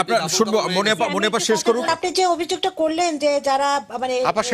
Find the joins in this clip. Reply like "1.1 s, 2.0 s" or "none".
1.9 s

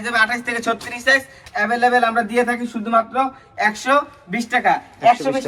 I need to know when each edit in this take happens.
none

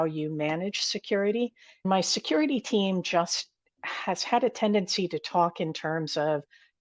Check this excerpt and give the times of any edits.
1.9 s

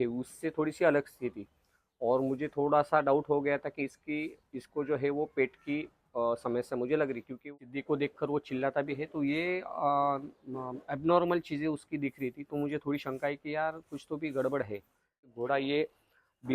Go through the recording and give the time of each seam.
7.5 s, 15.4 s

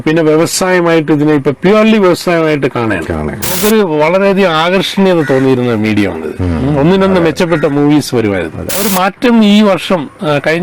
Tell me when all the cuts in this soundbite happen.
3.6 s, 8.9 s

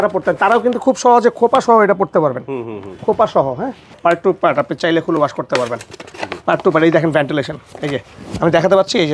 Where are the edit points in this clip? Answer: 3.9 s

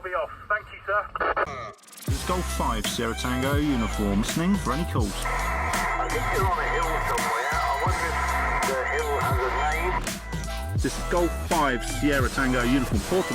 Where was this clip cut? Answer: 1.5 s

